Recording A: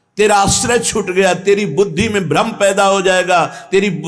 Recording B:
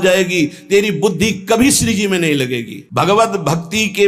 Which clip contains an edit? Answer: B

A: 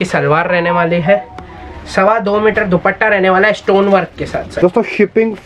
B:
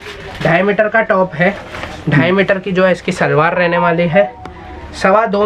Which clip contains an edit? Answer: A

